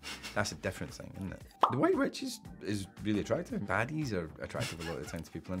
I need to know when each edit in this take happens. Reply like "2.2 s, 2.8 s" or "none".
1.6 s, 3.6 s